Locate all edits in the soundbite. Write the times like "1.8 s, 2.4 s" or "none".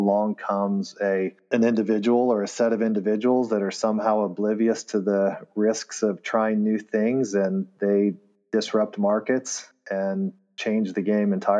10.5 s